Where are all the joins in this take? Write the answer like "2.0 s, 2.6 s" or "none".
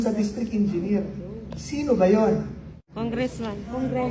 3.1 s